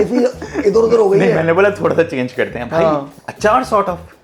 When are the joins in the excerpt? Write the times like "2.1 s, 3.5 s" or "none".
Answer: 3.1 s